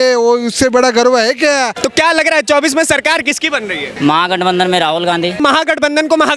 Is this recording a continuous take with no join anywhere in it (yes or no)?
no